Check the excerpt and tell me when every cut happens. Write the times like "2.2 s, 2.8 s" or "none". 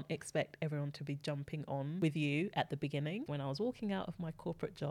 2.0 s, 3.2 s